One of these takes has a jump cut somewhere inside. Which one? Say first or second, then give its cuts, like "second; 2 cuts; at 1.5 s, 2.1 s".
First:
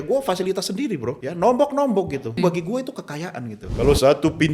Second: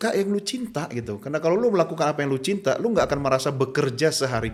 first; 3 cuts; at 1.2 s, 2.4 s, 3.6 s